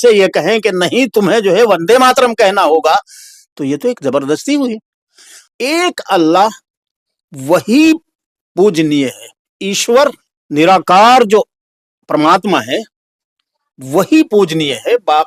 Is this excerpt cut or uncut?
cut